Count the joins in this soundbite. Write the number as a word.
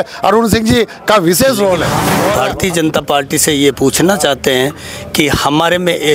one